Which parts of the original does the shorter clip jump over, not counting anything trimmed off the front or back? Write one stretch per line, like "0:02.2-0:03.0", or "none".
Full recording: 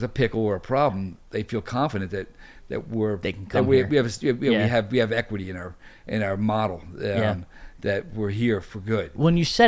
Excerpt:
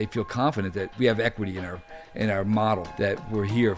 0:02.3-0:04.9
0:06.8-0:07.7